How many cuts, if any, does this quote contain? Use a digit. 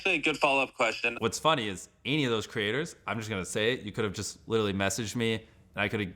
1